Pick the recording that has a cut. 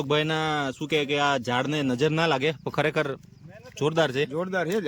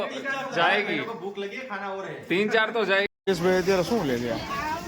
second; 1 cut; at 3.0 s

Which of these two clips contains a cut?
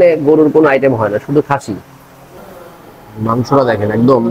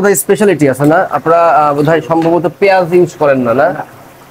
first; 1 cut; at 2.2 s

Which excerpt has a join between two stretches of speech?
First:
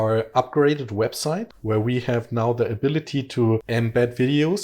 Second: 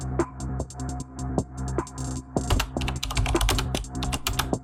first; 2 cuts; at 1.5 s, 3.7 s

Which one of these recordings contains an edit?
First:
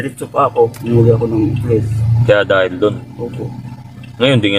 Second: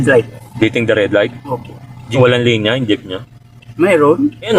second; 1 cut; at 2.0 s

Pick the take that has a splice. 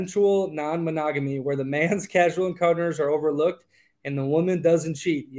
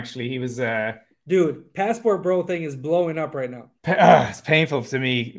second; 2 cuts; at 1.1 s, 3.7 s

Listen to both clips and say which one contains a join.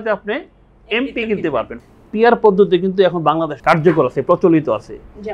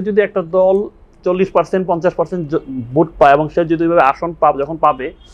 first; 2 cuts; at 1.7 s, 3.5 s

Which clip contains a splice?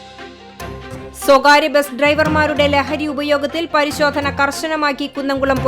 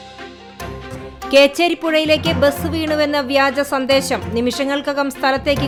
first; 1 cut; at 1.3 s

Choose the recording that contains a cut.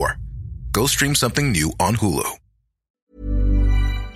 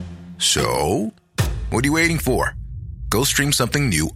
first; 1 cut; at 3.1 s

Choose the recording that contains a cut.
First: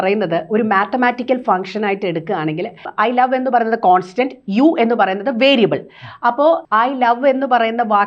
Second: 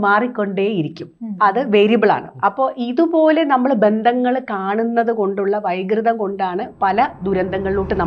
first; 2 cuts; at 2.8 s, 6.6 s

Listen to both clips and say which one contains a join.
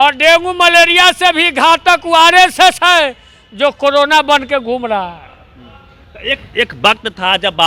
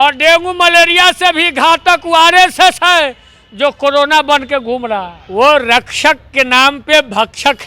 second; 1 cut; at 5.2 s

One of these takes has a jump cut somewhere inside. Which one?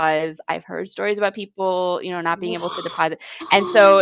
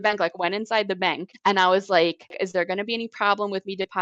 second; 2 cuts; at 1.3 s, 2.4 s

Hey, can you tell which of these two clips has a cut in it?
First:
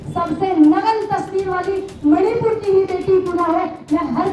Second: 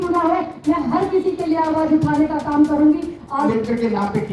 second; 1 cut; at 3.4 s

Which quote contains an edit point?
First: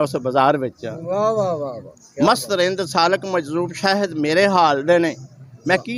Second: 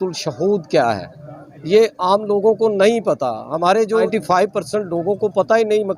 second; 1 cut; at 4.1 s

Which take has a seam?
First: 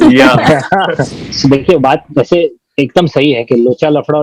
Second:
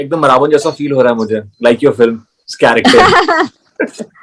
first; 1 cut; at 1.1 s

